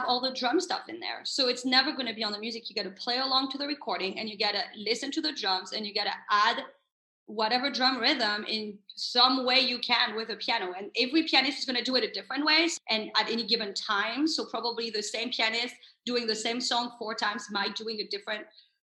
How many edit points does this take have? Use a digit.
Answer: 1